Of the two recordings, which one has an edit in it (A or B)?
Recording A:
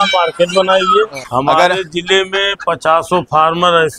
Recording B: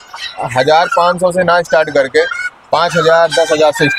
A